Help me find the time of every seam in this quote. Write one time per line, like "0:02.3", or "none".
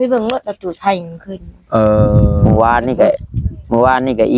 0:02.3